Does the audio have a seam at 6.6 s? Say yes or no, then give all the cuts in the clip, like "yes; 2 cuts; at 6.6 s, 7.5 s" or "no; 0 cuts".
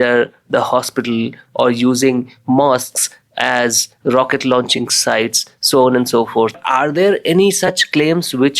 yes; 1 cut; at 6.6 s